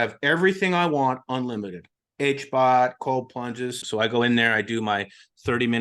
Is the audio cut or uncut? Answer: cut